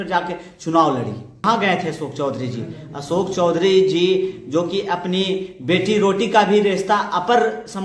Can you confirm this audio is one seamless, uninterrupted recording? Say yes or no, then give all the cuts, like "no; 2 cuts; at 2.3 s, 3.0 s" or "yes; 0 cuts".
no; 1 cut; at 1.3 s